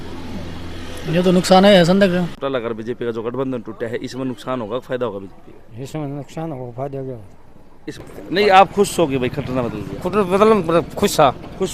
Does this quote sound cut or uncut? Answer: cut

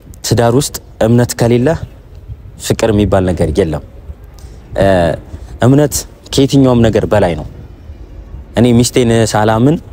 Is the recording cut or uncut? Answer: uncut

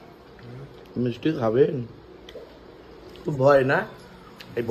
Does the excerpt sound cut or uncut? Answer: uncut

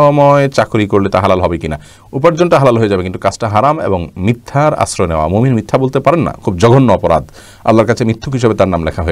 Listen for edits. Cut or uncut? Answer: uncut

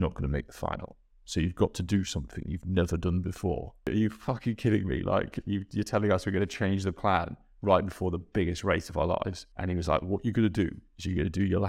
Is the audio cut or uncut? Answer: cut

